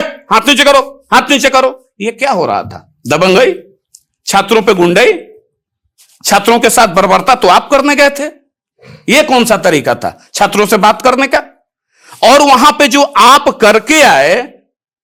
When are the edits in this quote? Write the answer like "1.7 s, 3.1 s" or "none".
none